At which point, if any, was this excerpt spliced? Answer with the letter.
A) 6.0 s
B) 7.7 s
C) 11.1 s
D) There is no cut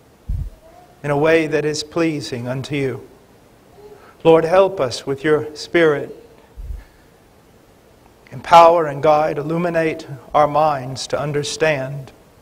D